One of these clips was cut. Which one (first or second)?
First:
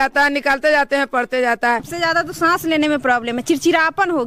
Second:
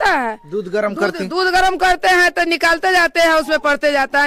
first